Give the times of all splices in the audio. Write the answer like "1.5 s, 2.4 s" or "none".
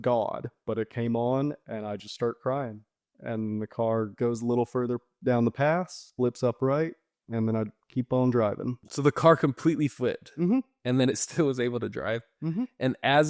8.9 s

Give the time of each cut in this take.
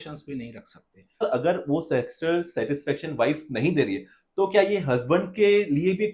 1.2 s

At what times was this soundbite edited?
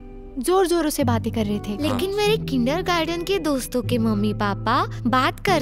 1.7 s

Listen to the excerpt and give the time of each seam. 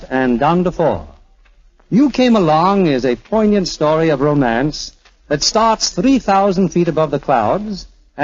none

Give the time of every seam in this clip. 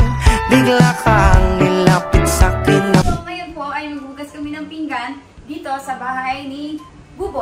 3.1 s

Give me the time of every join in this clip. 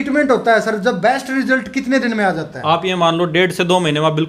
none

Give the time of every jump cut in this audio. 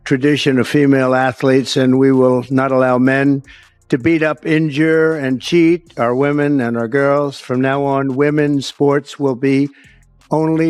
none

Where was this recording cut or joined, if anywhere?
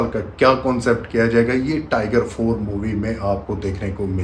none

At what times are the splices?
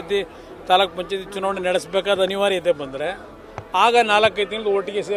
none

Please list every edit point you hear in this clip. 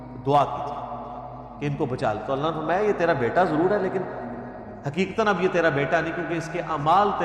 none

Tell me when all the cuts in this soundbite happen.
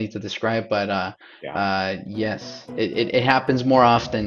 none

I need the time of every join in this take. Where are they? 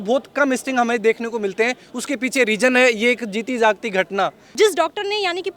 4.5 s

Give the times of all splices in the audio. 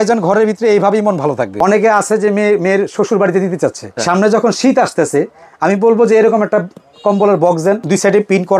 1.6 s, 4.0 s, 7.8 s

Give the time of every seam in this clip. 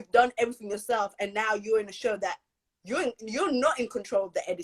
none

